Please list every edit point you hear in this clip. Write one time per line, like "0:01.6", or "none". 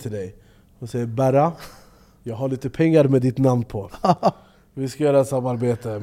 none